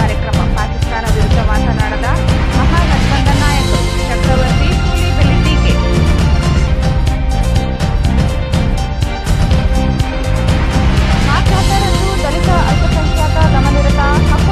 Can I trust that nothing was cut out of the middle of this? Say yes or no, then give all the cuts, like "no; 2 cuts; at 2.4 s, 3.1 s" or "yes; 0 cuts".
yes; 0 cuts